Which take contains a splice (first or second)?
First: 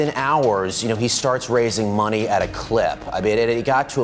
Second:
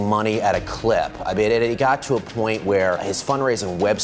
second